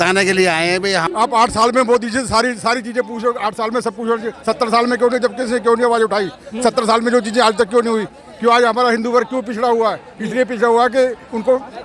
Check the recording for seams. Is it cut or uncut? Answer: cut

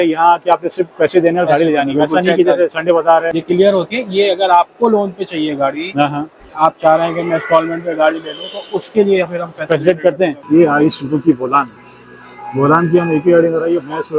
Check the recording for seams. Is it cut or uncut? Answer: cut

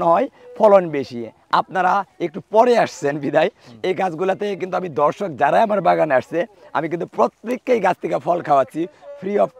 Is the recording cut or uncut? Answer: uncut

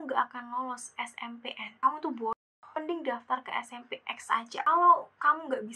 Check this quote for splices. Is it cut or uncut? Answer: uncut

